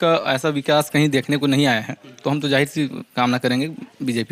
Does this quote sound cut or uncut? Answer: uncut